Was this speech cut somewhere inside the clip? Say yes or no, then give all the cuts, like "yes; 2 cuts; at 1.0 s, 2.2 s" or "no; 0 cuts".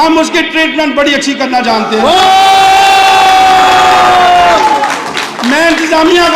no; 0 cuts